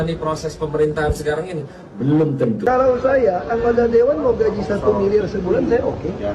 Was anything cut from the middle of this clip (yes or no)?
yes